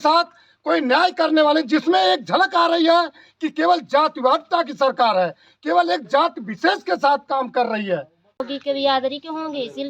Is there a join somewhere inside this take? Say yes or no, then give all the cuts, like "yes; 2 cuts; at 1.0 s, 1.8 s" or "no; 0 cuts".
yes; 1 cut; at 8.4 s